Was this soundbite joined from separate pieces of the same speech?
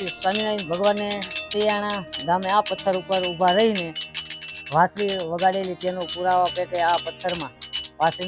yes; 1 cut; at 1.5 s

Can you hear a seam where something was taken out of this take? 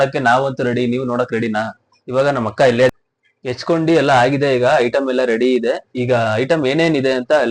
yes; 1 cut; at 2.9 s

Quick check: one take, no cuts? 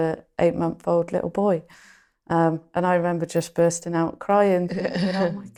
yes; 0 cuts

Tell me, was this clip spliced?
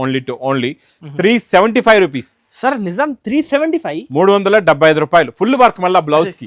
no; 0 cuts

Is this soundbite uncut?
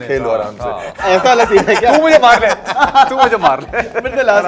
yes; 0 cuts

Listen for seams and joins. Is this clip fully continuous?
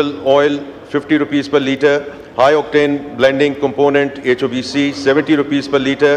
yes; 0 cuts

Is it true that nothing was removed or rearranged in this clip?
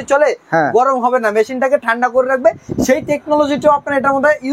yes; 0 cuts

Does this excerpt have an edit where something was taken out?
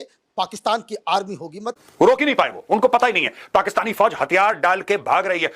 yes; 1 cut; at 1.6 s

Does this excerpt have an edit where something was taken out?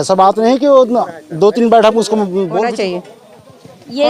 yes; 1 cut; at 2.6 s

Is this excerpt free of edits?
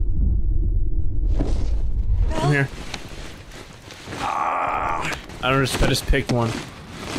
no; 1 cut; at 5.3 s

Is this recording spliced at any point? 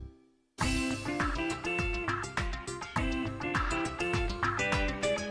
yes; 1 cut; at 0.9 s

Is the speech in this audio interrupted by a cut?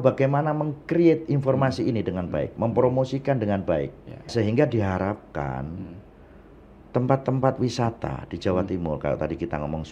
yes; 1 cut; at 4.3 s

